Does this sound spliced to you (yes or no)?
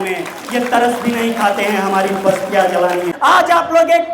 yes